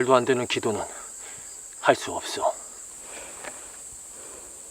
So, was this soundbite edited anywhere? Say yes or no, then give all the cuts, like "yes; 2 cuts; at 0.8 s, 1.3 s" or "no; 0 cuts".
yes; 1 cut; at 2.9 s